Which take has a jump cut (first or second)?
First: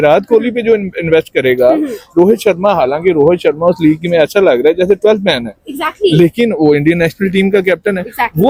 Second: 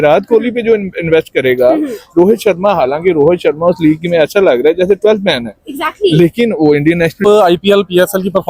second